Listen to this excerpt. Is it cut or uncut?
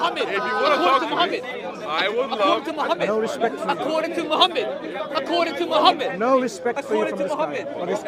uncut